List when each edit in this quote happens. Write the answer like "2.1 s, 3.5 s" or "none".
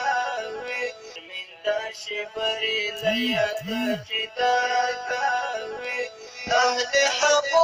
none